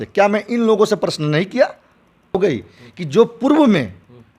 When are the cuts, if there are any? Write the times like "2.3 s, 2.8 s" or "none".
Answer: 2.3 s

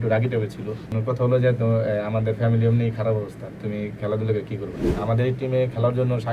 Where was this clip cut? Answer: 0.9 s, 4.9 s

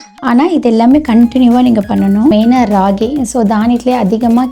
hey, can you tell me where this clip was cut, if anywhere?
2.3 s

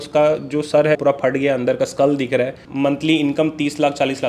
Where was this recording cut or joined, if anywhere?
1.0 s, 2.6 s

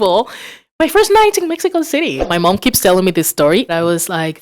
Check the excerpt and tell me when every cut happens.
2.2 s, 3.7 s

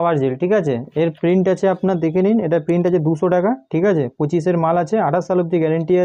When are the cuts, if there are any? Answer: none

